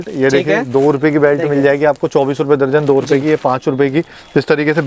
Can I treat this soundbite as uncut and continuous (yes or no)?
yes